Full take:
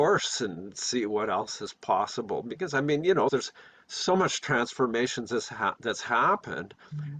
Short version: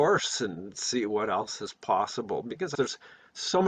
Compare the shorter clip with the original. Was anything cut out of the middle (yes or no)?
yes